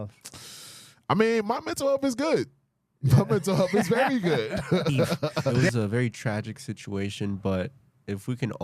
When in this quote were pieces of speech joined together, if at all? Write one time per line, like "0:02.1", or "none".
0:05.6